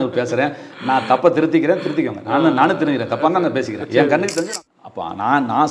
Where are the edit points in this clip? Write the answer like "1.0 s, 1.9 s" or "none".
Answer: 4.5 s